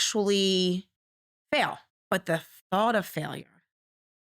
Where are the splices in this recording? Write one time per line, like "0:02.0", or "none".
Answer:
0:01.9